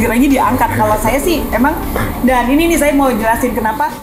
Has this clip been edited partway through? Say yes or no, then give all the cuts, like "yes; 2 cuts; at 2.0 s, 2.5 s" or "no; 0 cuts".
no; 0 cuts